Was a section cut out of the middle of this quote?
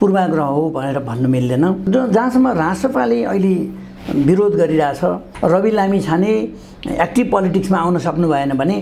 yes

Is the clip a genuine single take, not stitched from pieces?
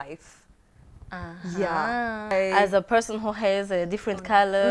no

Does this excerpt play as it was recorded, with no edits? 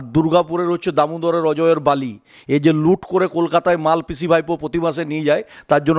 yes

